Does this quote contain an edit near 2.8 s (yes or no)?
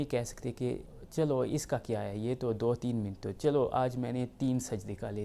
no